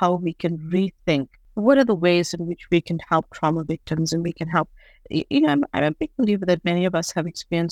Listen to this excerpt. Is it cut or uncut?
uncut